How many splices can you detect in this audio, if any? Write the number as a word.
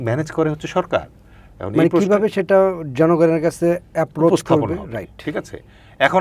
zero